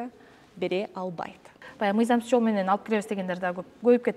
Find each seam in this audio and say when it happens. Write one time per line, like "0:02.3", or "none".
0:01.6